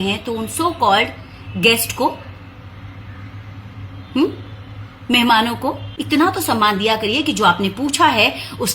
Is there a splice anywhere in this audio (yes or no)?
yes